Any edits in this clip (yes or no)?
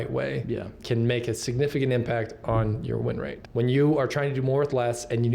yes